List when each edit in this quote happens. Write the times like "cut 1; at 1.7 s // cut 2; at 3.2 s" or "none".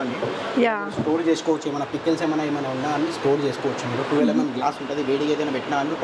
none